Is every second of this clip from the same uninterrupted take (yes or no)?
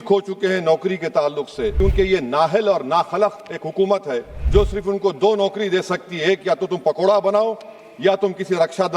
no